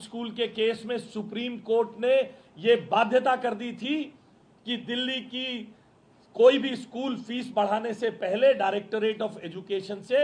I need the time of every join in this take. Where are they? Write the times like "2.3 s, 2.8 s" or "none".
none